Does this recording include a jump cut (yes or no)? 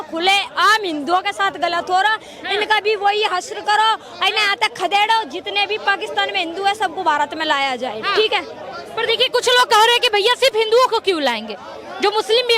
no